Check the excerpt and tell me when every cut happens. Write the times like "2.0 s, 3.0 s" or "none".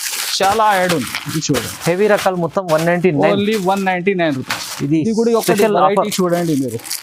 none